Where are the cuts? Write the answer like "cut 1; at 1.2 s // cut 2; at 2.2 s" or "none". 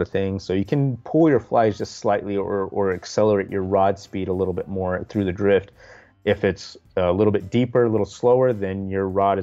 cut 1; at 6.2 s

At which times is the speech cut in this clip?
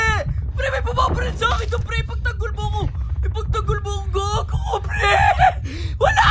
none

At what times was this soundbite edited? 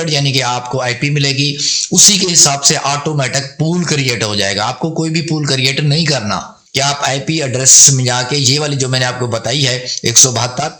cut 1; at 6.6 s

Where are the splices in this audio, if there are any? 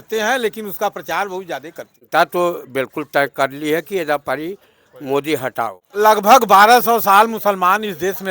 cut 1; at 2.1 s // cut 2; at 5.8 s

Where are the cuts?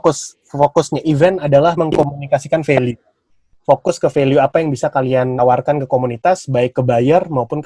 cut 1; at 1.8 s

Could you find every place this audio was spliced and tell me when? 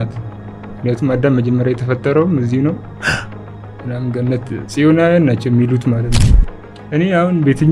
cut 1; at 6.2 s

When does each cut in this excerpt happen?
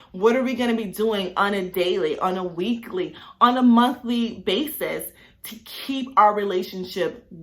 none

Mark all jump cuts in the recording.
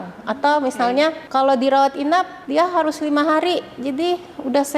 cut 1; at 1.2 s // cut 2; at 2.4 s

